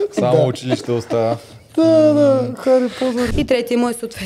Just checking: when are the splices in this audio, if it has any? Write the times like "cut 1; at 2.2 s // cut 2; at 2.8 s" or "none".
cut 1; at 3.3 s